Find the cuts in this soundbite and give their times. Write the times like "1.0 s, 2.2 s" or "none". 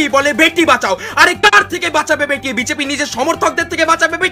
none